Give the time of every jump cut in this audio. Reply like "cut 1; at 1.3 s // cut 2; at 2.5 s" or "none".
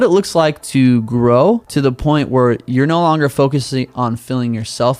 cut 1; at 1.7 s